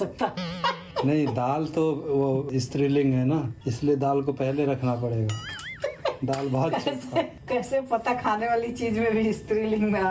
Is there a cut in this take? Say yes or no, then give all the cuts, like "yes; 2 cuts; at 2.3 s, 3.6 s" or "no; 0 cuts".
no; 0 cuts